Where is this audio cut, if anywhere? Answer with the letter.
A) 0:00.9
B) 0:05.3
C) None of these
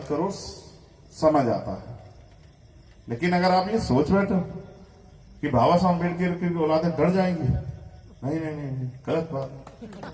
C